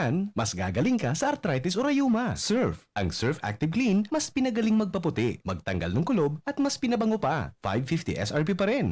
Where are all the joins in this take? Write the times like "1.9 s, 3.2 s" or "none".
2.4 s